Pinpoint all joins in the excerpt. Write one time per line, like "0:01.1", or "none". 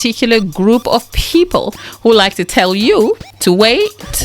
0:01.8
0:03.3